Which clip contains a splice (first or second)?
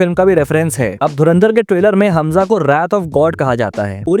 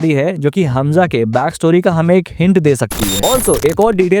second